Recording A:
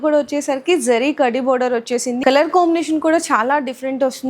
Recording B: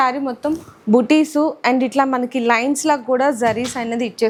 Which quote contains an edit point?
A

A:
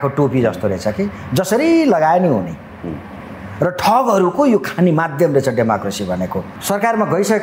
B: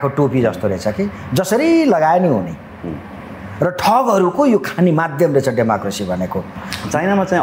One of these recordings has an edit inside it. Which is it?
A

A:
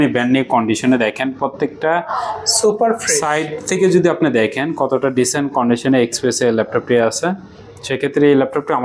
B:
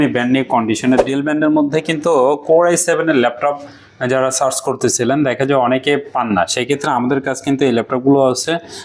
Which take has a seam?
B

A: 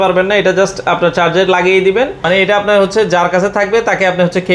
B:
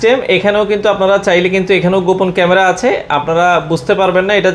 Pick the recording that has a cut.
A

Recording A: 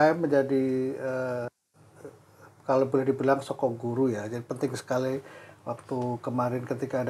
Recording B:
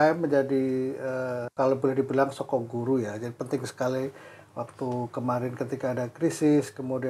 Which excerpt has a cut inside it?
B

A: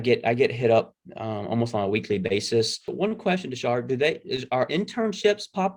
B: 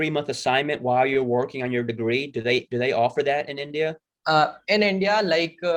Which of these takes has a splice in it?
A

